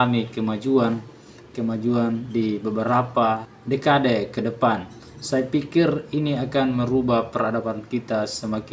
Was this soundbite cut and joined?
yes; 1 cut; at 3.5 s

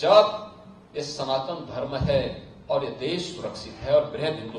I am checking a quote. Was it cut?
no; 0 cuts

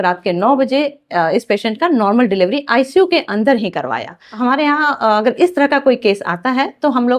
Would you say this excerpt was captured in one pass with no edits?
yes; 0 cuts

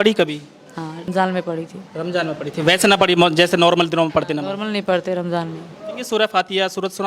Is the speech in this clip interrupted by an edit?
yes; 2 cuts; at 1.1 s, 6.0 s

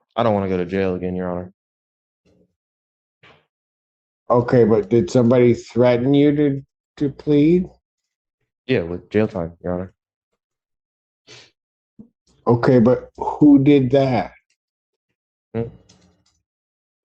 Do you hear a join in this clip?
no; 0 cuts

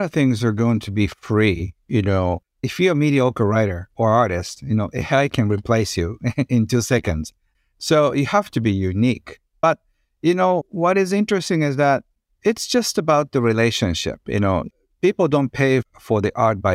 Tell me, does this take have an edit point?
no; 0 cuts

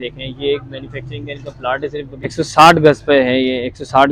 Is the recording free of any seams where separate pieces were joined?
no; 1 cut; at 2.3 s

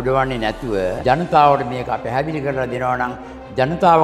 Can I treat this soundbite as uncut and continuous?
no; 1 cut; at 1.0 s

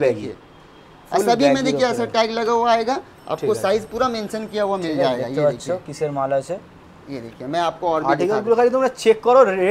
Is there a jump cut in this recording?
no; 0 cuts

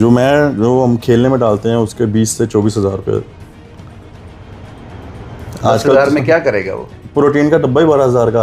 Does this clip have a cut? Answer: no; 0 cuts

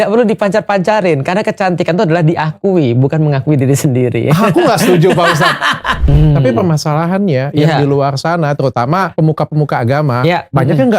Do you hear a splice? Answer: yes; 2 cuts; at 6.0 s, 9.1 s

